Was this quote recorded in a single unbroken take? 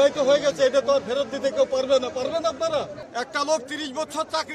no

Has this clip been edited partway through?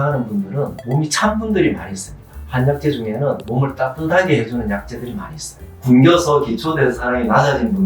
yes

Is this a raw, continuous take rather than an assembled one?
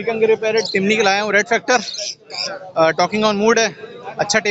yes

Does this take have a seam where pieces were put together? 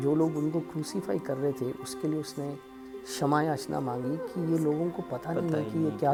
no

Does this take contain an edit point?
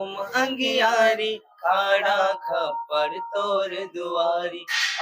no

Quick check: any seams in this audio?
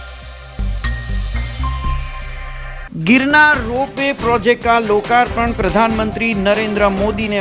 no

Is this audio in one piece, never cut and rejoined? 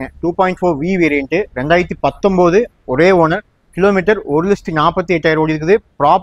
yes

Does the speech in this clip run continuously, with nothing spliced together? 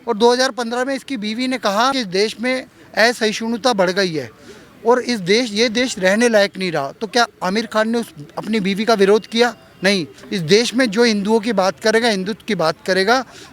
no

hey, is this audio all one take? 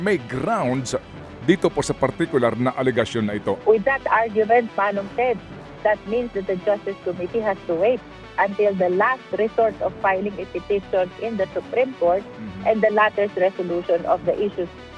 no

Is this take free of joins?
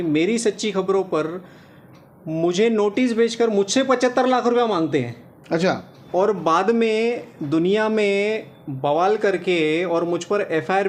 yes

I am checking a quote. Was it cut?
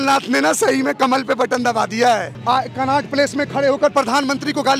yes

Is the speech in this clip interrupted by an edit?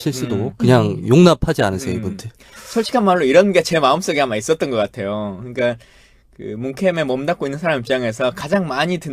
yes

